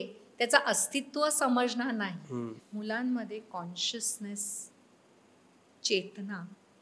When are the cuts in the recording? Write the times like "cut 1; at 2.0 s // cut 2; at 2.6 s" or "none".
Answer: cut 1; at 2.6 s